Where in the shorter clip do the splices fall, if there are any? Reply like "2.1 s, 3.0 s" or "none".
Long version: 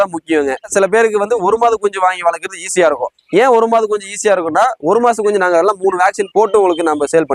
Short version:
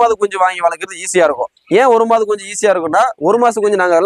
none